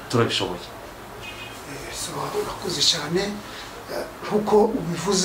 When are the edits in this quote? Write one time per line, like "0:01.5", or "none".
none